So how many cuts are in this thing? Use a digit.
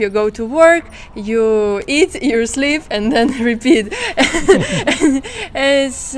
0